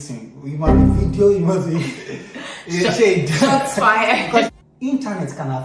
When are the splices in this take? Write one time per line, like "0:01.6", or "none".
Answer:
0:04.5